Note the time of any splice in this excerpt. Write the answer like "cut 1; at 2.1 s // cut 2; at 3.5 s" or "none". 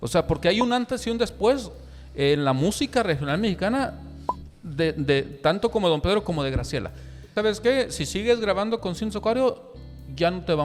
cut 1; at 7.3 s